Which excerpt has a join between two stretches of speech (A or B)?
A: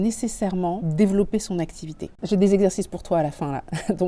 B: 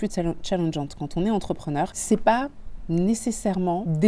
A